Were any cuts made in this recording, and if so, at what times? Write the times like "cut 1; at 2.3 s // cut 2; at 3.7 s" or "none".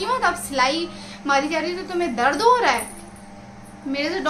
none

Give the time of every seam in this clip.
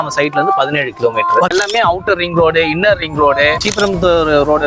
cut 1; at 1.5 s // cut 2; at 3.7 s

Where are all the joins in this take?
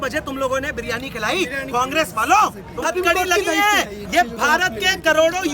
cut 1; at 2.8 s

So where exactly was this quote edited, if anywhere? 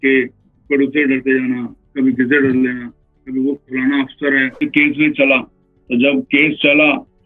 cut 1; at 4.6 s

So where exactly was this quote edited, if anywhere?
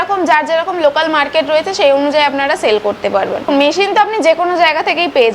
cut 1; at 3.4 s

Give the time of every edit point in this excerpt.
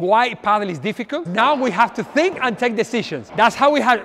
cut 1; at 1.3 s // cut 2; at 3.2 s

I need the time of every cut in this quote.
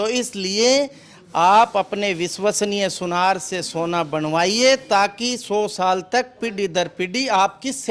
none

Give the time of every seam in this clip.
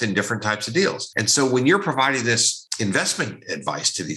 cut 1; at 1.1 s // cut 2; at 2.6 s

